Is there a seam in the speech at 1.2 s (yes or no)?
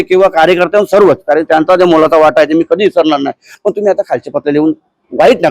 no